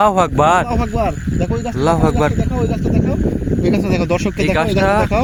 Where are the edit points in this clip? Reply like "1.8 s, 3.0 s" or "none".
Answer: none